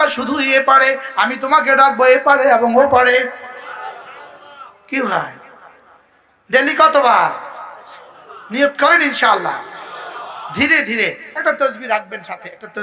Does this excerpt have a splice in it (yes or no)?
no